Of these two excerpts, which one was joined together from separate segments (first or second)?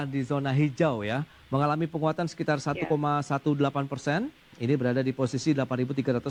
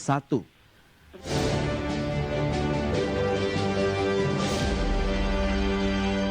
second